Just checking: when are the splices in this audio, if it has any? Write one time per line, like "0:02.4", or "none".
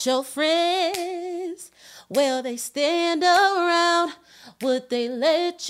none